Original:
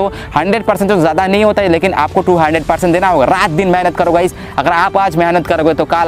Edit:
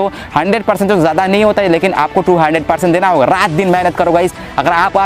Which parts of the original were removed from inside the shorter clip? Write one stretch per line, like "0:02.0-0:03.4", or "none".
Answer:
none